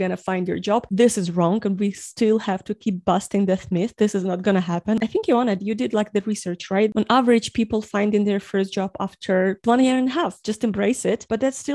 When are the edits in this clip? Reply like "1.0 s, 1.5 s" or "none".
5.0 s, 6.9 s, 9.6 s, 10.4 s